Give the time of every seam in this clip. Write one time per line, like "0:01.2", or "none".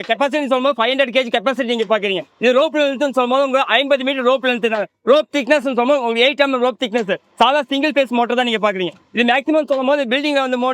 none